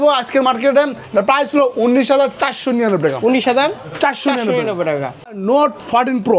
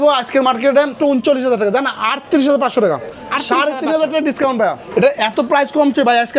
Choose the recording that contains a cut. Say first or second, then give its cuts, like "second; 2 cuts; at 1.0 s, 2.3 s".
second; 2 cuts; at 0.9 s, 4.8 s